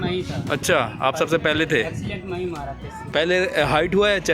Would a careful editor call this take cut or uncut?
cut